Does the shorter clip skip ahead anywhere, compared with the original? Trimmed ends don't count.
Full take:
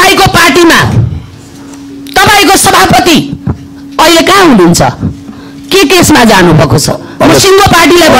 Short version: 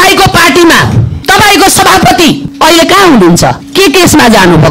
yes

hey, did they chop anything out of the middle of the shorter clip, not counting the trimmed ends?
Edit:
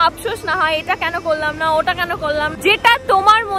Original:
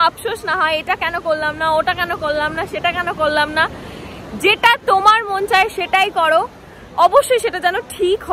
yes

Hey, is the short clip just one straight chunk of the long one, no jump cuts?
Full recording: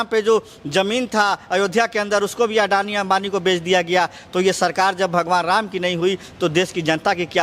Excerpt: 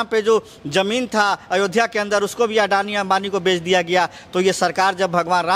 yes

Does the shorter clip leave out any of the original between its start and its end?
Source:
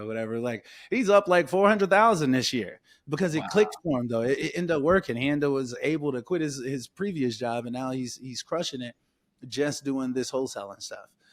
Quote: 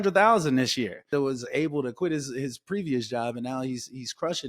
yes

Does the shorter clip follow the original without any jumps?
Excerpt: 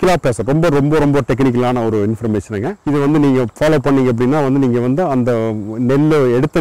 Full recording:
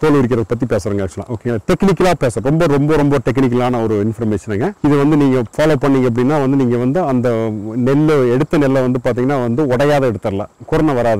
yes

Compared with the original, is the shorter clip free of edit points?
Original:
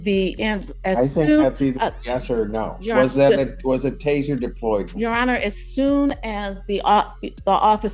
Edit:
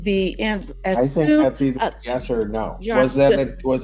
yes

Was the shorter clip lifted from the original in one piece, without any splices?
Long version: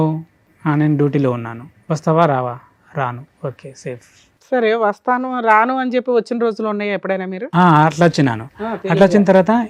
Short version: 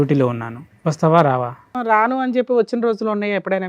no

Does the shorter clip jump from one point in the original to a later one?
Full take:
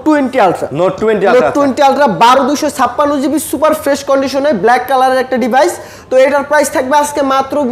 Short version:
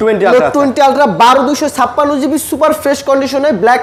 no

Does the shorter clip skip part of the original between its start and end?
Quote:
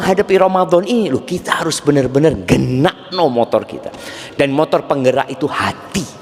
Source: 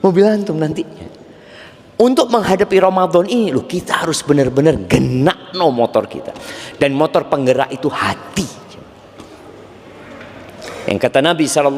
no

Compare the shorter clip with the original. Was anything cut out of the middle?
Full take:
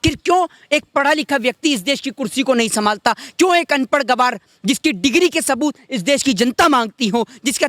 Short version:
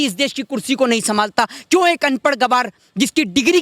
no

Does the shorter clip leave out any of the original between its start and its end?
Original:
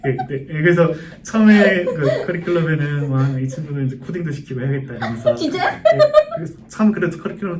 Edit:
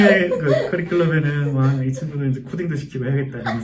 no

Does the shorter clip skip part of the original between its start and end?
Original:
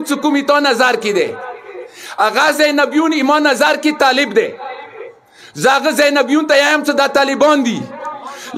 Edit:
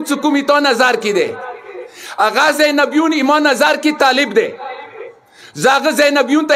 no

